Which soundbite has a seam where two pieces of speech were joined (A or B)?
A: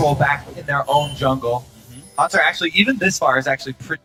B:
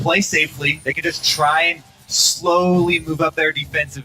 B